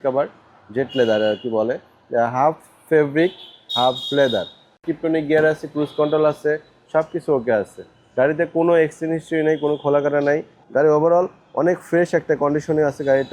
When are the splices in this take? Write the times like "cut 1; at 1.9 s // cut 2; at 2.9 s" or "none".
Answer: cut 1; at 4.8 s // cut 2; at 10.6 s

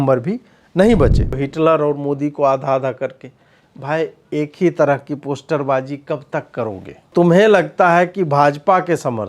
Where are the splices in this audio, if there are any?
cut 1; at 1.4 s // cut 2; at 7.1 s

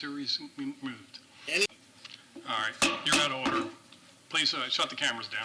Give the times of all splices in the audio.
cut 1; at 1.7 s

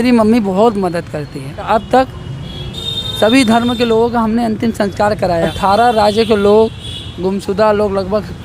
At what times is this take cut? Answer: cut 1; at 1.6 s // cut 2; at 5.5 s

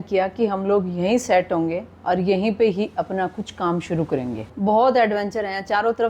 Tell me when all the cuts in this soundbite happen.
cut 1; at 4.4 s

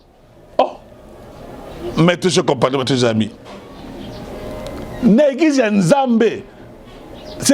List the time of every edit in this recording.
none

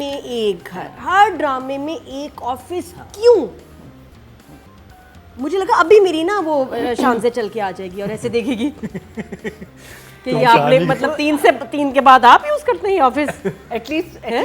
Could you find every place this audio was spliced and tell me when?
none

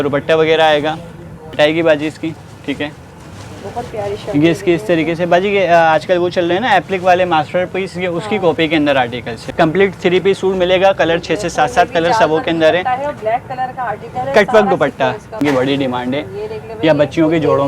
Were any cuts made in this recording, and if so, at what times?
cut 1; at 1.5 s // cut 2; at 9.4 s // cut 3; at 15.4 s

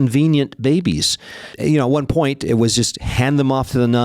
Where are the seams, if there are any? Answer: cut 1; at 1.5 s

